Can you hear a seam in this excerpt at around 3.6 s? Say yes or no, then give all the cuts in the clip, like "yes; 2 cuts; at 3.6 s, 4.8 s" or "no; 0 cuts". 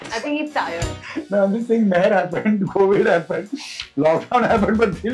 no; 0 cuts